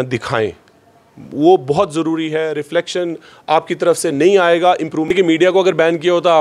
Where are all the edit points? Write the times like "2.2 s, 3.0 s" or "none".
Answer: 5.0 s